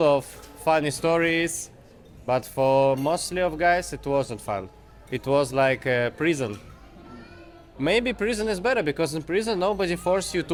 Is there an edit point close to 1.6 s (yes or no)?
no